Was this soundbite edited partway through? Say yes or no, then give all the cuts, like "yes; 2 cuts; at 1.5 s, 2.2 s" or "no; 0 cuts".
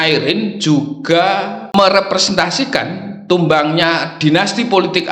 yes; 1 cut; at 1.7 s